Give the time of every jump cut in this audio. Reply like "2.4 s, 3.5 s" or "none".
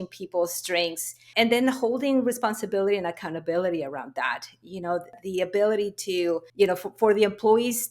1.2 s, 5.2 s, 6.5 s